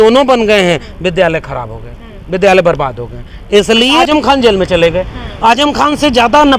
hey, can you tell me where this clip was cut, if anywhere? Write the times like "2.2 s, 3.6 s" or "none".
4.0 s